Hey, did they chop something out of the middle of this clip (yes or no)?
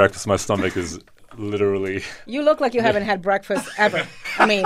no